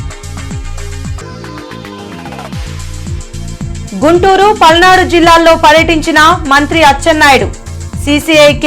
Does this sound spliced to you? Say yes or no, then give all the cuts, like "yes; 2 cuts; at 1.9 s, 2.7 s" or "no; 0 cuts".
yes; 1 cut; at 3.7 s